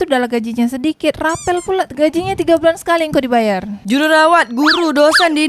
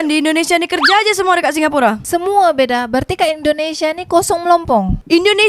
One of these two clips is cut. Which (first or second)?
first